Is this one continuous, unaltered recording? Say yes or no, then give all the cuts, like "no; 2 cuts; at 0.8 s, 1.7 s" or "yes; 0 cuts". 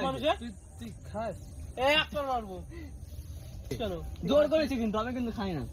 no; 1 cut; at 3.7 s